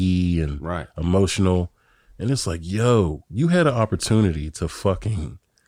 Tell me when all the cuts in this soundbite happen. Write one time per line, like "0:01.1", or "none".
none